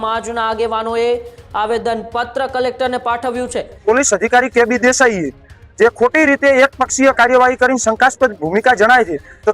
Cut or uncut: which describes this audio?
cut